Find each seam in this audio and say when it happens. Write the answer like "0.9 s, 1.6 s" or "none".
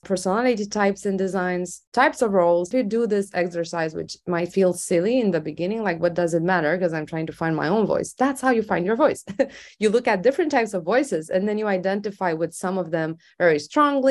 none